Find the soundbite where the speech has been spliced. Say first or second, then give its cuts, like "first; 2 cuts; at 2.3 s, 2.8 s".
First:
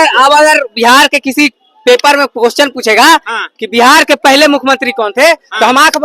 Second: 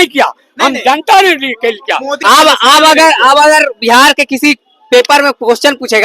second; 1 cut; at 2.1 s